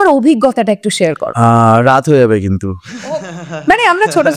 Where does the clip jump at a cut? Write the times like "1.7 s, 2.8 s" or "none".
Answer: 1.3 s